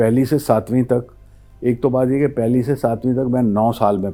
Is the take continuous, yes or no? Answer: yes